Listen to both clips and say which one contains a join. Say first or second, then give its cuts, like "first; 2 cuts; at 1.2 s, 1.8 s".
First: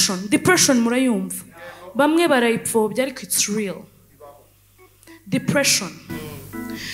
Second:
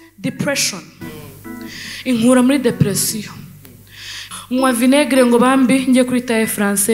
second; 1 cut; at 4.2 s